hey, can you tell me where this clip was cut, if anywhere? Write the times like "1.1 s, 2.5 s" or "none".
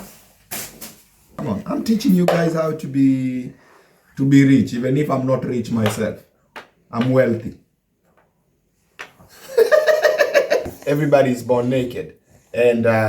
1.3 s, 10.6 s